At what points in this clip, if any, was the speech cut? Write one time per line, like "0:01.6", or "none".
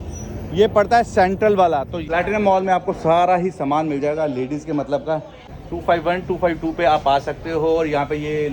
0:02.0
0:05.4